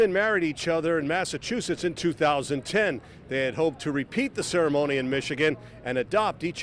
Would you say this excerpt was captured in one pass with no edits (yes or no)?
yes